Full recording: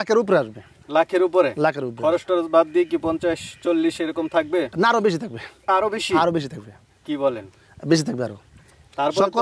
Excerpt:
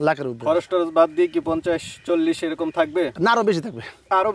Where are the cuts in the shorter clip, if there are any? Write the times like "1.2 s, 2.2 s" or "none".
none